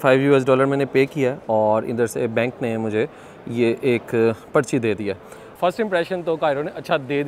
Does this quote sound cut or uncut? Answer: cut